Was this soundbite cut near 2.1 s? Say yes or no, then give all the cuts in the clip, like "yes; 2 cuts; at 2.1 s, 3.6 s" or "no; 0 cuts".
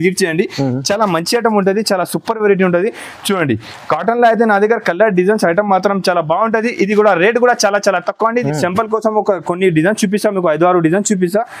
no; 1 cut; at 8.4 s